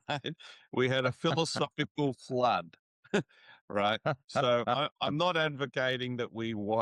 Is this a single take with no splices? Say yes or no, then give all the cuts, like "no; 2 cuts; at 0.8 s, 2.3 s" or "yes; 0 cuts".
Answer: yes; 0 cuts